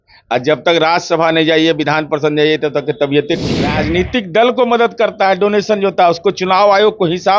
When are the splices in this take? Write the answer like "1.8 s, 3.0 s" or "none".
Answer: 3.7 s